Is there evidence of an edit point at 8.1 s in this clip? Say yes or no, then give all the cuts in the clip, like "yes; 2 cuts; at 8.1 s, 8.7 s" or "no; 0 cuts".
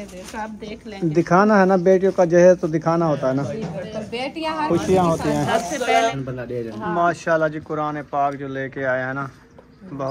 no; 1 cut; at 6.1 s